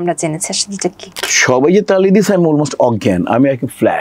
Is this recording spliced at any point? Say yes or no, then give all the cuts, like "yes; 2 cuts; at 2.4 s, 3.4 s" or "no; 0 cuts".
yes; 1 cut; at 1.1 s